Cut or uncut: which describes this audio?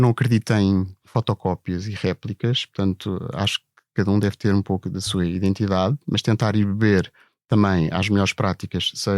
cut